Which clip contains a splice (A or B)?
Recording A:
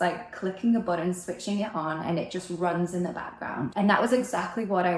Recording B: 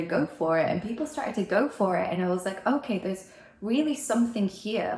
A